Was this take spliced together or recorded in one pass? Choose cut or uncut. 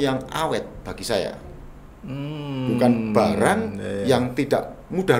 uncut